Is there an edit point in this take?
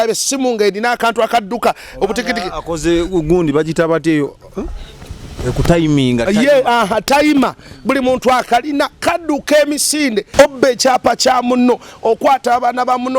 yes; 1 cut; at 10.3 s

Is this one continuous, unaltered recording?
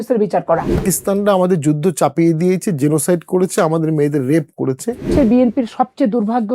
no; 2 cuts; at 0.8 s, 5.1 s

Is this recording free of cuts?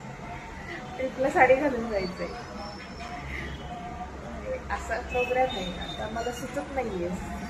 yes; 0 cuts

